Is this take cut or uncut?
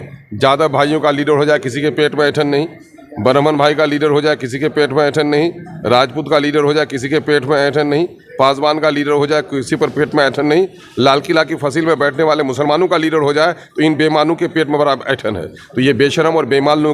uncut